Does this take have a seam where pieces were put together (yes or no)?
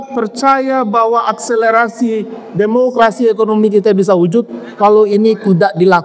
no